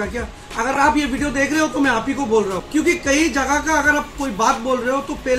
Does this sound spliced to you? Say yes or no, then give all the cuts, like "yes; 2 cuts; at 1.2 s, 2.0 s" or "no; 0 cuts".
yes; 1 cut; at 2.6 s